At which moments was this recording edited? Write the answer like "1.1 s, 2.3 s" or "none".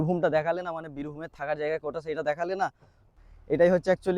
3.1 s